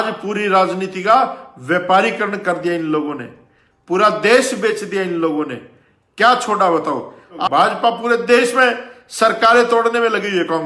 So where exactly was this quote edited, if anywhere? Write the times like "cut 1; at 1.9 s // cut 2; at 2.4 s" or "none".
cut 1; at 7.4 s

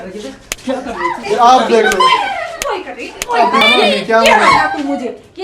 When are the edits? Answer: cut 1; at 1.2 s // cut 2; at 3.6 s

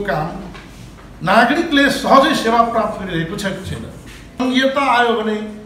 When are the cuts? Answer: cut 1; at 4.4 s

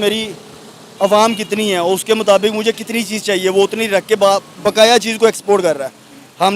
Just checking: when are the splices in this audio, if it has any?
cut 1; at 4.5 s

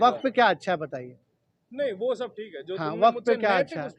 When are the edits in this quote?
none

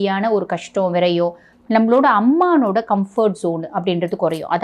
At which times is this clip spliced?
cut 1; at 1.5 s

